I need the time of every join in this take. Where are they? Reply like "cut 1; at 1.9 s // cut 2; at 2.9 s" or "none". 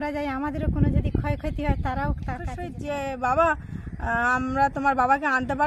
cut 1; at 2.7 s

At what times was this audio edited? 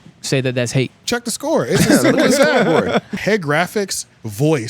cut 1; at 1.0 s // cut 2; at 3.1 s

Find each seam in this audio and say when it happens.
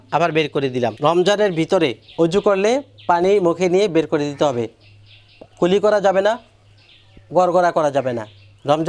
cut 1; at 0.9 s

